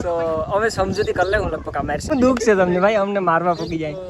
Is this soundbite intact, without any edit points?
no; 1 cut; at 2.1 s

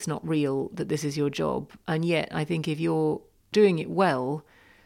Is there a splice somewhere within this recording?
yes; 1 cut; at 3.5 s

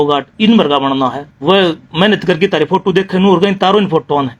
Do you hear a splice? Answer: yes; 1 cut; at 1.3 s

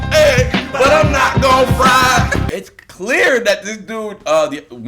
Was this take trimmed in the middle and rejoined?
yes; 1 cut; at 2.4 s

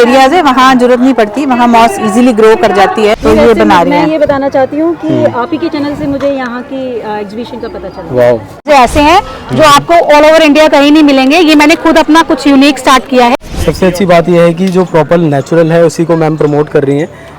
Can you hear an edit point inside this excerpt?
yes; 3 cuts; at 3.2 s, 8.6 s, 13.3 s

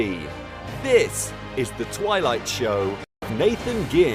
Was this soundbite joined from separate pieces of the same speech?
yes; 1 cut; at 3.2 s

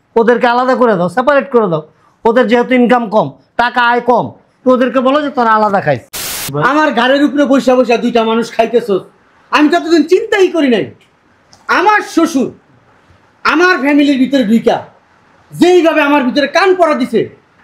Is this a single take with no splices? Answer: no; 1 cut; at 6.4 s

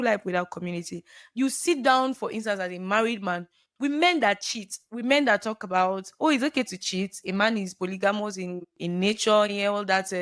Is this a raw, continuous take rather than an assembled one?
no; 1 cut; at 1.2 s

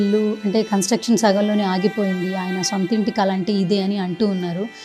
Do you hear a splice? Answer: no; 0 cuts

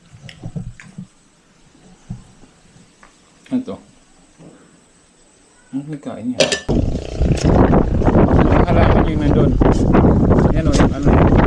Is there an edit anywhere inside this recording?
yes; 1 cut; at 6.7 s

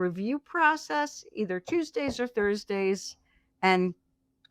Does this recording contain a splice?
no; 0 cuts

